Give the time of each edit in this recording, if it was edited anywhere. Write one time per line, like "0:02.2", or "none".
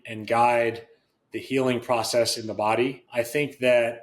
0:03.0